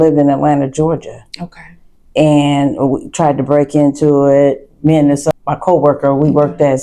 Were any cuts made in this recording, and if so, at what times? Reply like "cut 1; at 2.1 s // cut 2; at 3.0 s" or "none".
none